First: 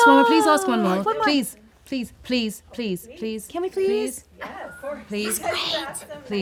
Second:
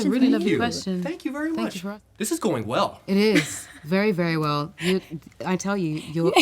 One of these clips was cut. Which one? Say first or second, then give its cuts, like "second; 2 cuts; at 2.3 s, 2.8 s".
second; 1 cut; at 1.9 s